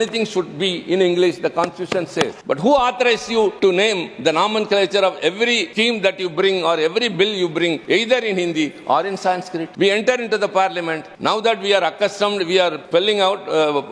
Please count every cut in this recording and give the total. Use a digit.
7